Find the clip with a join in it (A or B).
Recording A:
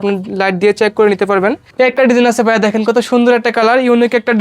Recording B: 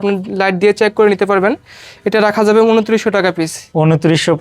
A